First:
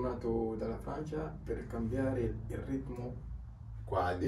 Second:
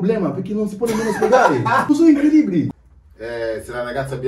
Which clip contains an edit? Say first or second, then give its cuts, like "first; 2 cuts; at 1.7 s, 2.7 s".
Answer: second; 2 cuts; at 1.9 s, 2.7 s